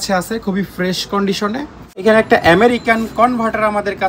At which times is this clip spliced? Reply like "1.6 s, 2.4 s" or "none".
2.0 s